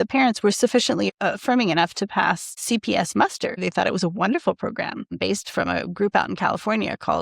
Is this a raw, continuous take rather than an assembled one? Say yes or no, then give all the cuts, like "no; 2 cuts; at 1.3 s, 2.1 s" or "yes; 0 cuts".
no; 4 cuts; at 1.1 s, 2.6 s, 3.6 s, 5.1 s